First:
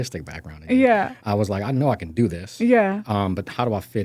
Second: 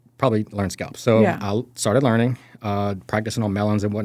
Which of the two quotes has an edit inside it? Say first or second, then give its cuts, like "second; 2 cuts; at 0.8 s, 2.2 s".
first; 1 cut; at 1.2 s